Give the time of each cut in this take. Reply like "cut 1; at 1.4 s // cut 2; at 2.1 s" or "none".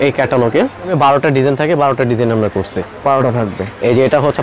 cut 1; at 0.9 s